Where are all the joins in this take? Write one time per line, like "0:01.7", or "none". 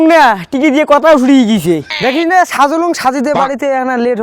0:01.9

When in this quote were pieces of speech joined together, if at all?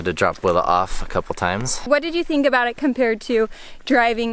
0:01.8

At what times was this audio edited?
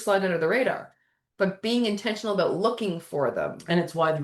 none

